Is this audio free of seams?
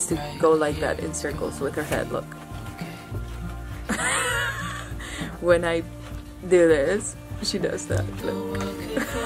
yes; 0 cuts

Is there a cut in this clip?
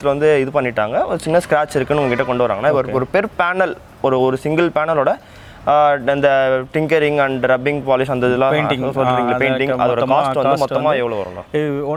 no; 0 cuts

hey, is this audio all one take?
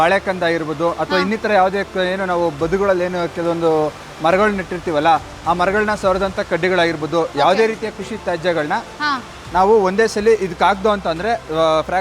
yes; 0 cuts

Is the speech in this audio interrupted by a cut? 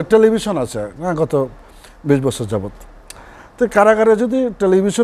no; 0 cuts

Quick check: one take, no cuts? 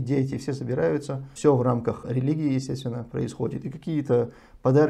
no; 2 cuts; at 1.3 s, 2.0 s

